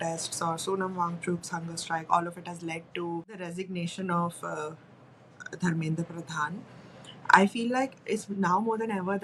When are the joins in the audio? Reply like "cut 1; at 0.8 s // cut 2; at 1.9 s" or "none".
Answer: none